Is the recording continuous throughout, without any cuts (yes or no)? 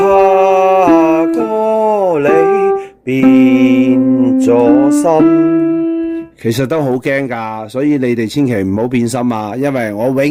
yes